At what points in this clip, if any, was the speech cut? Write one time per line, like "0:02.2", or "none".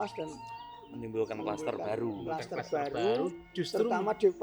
none

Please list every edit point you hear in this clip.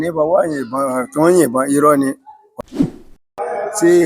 0:02.7

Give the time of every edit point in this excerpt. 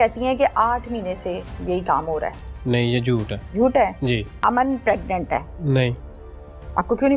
0:03.4
0:04.3
0:05.5

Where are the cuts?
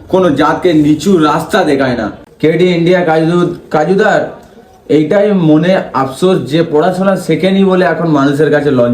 0:02.1

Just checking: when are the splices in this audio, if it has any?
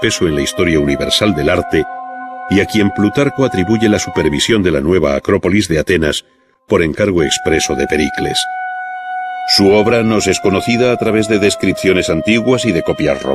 0:09.6

